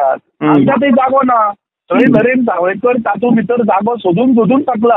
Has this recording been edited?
no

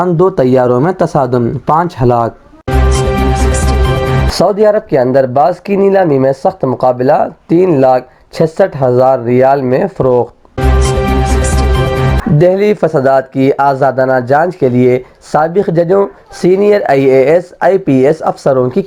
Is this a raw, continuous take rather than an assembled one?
no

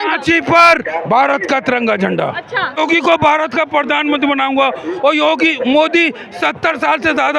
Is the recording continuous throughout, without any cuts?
no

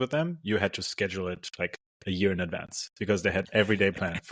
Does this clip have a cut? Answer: no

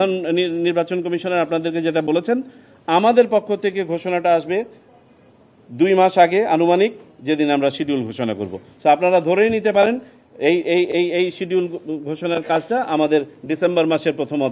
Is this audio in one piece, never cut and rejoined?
yes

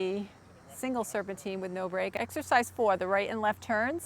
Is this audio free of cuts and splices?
no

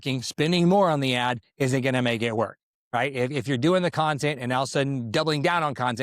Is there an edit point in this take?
no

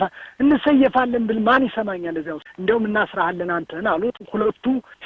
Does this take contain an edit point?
yes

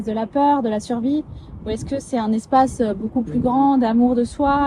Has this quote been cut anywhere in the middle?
no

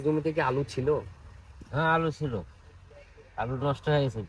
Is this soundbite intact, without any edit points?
yes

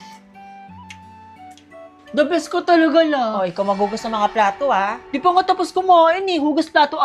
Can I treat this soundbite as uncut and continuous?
yes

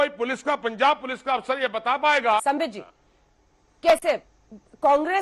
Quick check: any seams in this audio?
yes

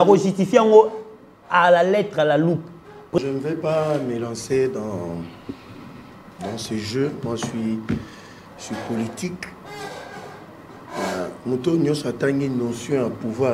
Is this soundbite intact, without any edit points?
no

